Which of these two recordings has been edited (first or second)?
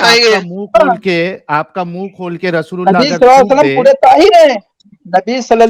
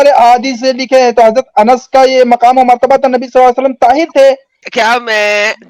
second